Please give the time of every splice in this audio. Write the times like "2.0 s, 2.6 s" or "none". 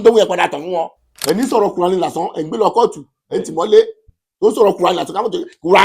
1.0 s